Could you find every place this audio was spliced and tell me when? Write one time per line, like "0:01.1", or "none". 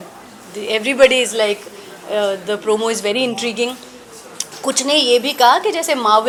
none